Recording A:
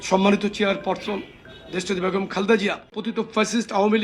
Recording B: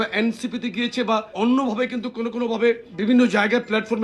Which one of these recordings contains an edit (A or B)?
A